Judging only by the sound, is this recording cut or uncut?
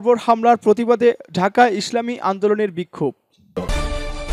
cut